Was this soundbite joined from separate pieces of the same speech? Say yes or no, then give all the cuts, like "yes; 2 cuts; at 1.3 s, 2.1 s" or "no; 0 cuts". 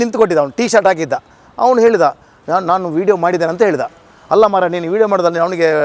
no; 0 cuts